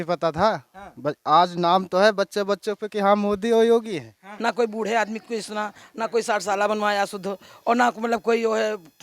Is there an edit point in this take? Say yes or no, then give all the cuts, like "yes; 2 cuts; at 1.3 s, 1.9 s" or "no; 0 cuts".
yes; 1 cut; at 4.3 s